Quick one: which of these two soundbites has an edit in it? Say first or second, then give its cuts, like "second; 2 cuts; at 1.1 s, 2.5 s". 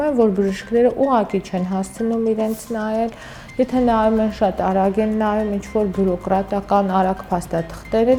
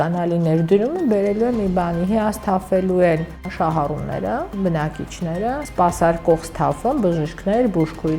second; 3 cuts; at 3.5 s, 4.5 s, 5.6 s